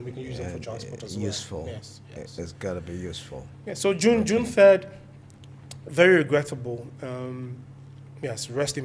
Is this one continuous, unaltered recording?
yes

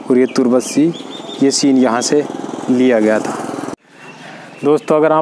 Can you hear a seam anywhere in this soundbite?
no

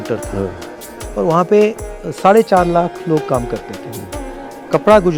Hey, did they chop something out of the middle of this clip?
no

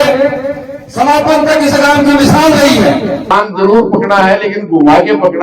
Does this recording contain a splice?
yes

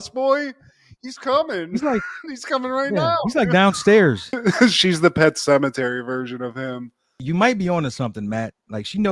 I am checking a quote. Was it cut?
yes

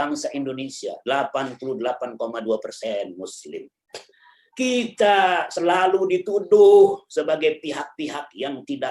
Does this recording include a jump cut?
no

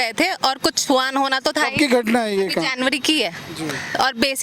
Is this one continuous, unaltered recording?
yes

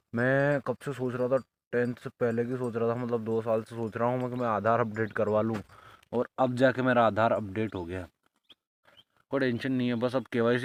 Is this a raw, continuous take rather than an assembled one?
yes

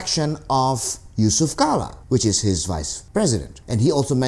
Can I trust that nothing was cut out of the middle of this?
no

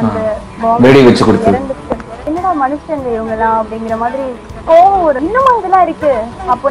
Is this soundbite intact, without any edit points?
no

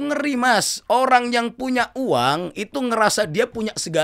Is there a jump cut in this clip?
no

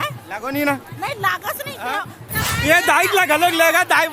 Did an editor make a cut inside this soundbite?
yes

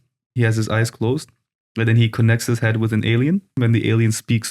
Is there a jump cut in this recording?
yes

